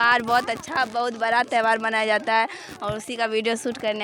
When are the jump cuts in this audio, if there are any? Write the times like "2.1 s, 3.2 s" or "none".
none